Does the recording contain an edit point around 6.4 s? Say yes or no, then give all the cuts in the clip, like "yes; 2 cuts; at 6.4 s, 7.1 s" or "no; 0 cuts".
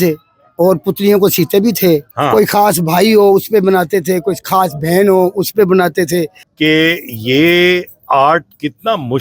yes; 2 cuts; at 2.1 s, 6.4 s